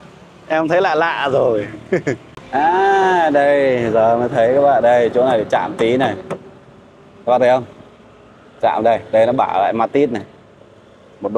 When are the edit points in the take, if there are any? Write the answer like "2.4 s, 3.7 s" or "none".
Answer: 2.3 s